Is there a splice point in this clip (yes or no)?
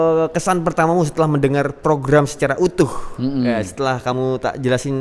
no